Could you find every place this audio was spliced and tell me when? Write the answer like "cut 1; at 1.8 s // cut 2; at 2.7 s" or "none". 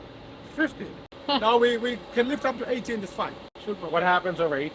cut 1; at 1.2 s // cut 2; at 3.4 s